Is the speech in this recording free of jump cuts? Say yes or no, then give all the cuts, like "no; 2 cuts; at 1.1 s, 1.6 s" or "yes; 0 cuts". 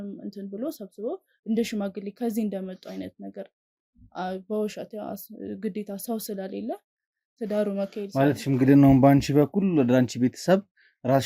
yes; 0 cuts